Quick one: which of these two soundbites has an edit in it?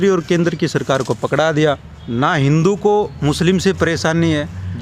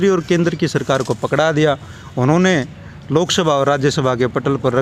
first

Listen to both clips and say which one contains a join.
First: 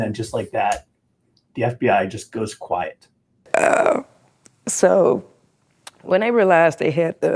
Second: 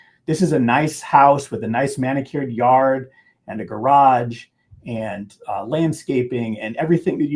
first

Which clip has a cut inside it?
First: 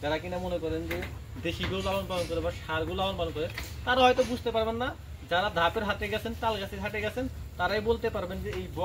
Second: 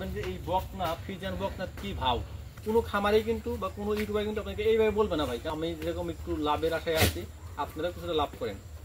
second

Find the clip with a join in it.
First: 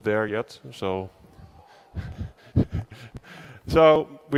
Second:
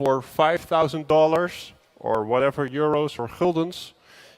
second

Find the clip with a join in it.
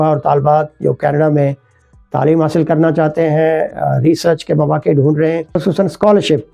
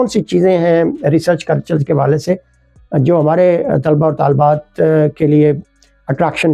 first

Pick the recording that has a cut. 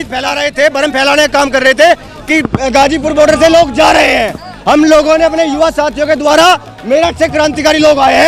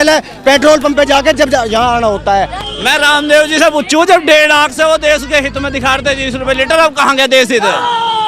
second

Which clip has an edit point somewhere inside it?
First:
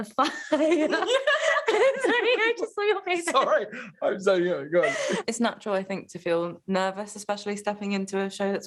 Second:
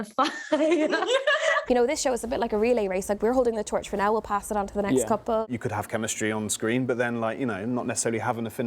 second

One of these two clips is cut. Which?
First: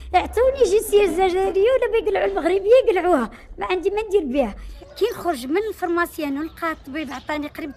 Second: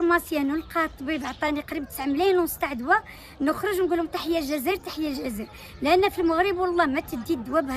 first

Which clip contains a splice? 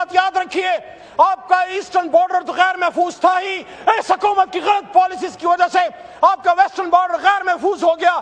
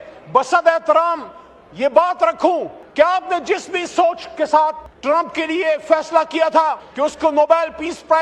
second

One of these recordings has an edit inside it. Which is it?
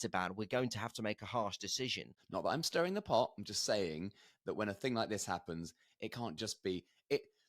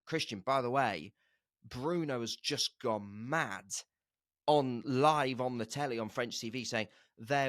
first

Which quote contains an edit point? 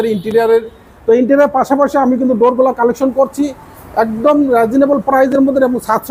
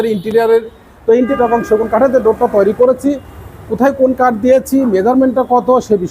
second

